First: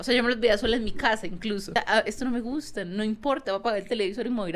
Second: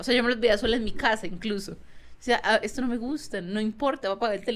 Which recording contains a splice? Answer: first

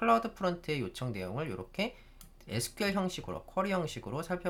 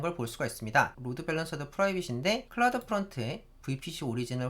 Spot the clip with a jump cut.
second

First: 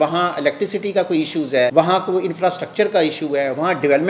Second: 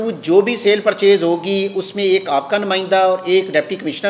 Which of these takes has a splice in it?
first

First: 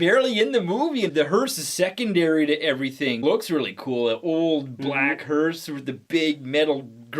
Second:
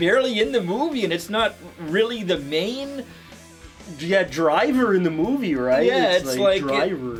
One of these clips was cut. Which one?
first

